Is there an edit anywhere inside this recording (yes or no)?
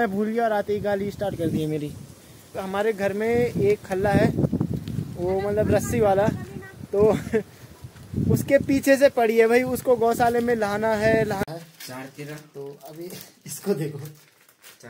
yes